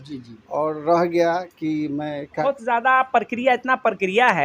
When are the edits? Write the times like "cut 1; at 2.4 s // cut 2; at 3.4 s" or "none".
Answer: cut 1; at 2.4 s